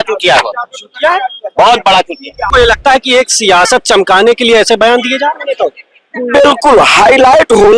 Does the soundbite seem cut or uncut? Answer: cut